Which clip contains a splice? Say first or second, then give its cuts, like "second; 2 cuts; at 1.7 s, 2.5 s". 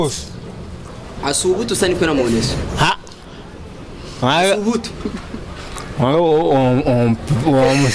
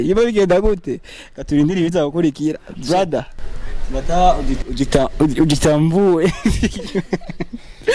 second; 1 cut; at 2.7 s